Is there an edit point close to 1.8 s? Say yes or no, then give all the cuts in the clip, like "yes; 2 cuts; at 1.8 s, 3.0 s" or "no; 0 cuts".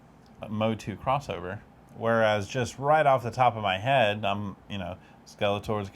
yes; 1 cut; at 1.8 s